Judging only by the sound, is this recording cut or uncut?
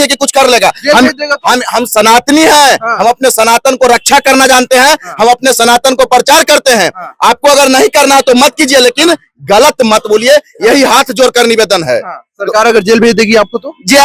uncut